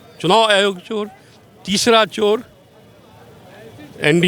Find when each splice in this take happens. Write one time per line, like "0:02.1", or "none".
none